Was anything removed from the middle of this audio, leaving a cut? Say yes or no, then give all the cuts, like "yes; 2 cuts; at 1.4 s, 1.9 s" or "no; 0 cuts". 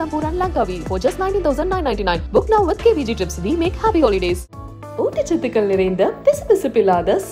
no; 0 cuts